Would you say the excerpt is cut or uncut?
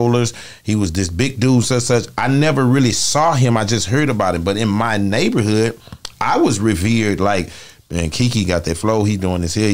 uncut